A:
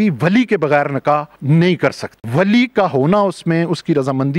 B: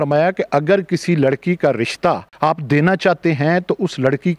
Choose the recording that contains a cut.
B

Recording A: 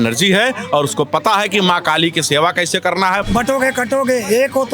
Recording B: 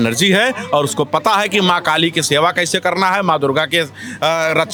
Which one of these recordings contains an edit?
A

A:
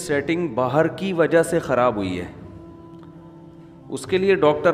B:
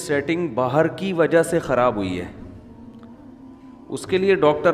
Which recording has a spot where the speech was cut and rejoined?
A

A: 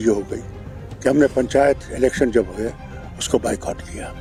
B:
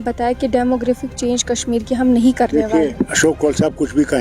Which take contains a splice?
B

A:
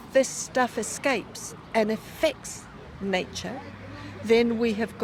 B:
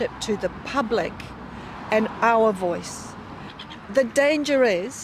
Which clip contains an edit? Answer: B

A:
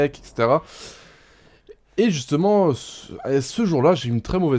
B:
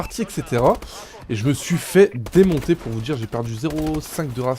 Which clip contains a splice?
B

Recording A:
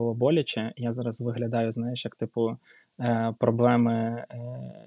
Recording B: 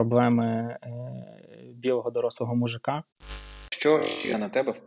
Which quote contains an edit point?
B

